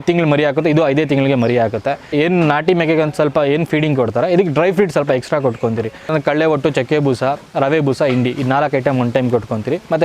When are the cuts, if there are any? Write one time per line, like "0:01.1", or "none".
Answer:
0:02.1
0:06.1